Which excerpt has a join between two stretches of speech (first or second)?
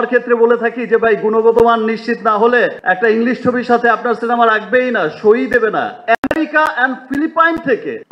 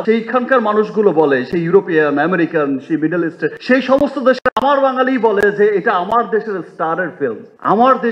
first